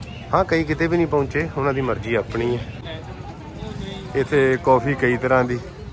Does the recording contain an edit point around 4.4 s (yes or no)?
no